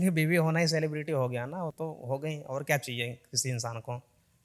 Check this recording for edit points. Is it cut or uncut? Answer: uncut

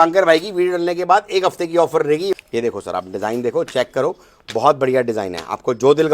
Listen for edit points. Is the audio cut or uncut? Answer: cut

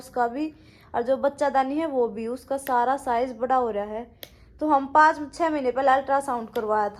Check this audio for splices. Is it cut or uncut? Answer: uncut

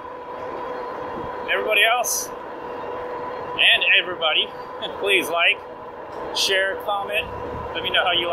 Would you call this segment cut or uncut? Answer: uncut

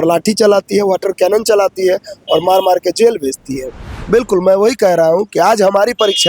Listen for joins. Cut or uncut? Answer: cut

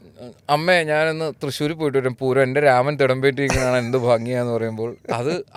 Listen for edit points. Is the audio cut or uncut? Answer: uncut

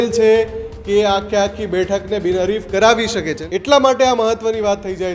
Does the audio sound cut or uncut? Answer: cut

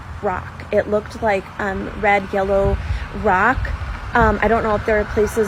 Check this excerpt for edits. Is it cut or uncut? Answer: uncut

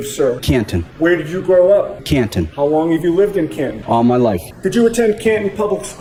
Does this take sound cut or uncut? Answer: uncut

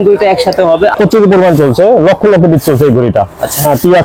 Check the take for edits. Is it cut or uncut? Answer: cut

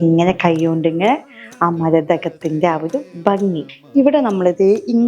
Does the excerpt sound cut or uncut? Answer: cut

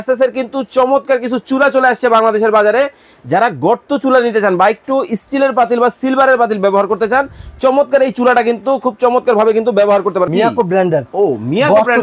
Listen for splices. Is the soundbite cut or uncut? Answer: cut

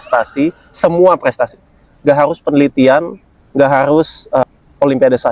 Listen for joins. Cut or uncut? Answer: cut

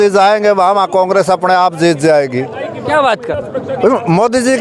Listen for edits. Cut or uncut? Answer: uncut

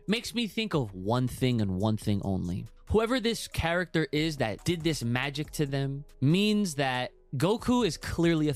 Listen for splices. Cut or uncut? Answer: cut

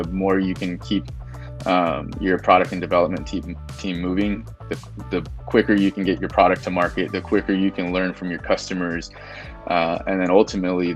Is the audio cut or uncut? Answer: uncut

